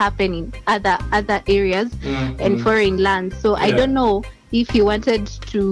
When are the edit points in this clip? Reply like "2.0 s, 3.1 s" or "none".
none